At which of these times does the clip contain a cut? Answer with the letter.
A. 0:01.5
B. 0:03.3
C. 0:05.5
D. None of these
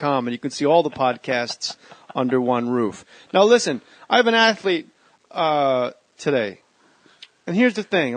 C